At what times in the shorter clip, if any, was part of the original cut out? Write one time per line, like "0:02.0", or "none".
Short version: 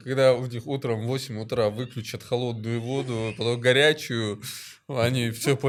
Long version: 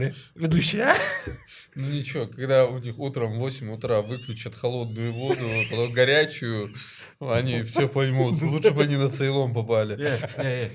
none